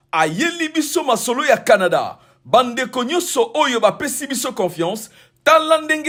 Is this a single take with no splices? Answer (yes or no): yes